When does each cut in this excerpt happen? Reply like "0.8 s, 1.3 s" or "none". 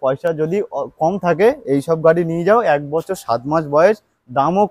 none